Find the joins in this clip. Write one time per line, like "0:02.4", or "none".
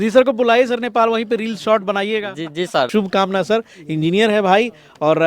0:02.9